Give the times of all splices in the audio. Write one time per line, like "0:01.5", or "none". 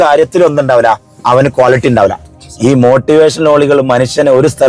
0:01.1
0:02.5